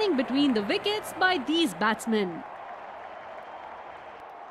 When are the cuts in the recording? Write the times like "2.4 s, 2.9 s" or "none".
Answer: none